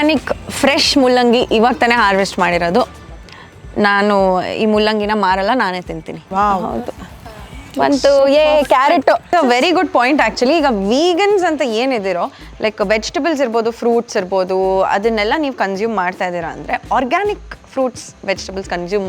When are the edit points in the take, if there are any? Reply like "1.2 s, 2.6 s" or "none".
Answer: 6.2 s, 9.3 s